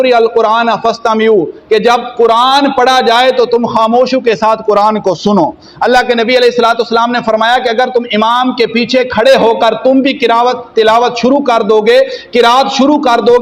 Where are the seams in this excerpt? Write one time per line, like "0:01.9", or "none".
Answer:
none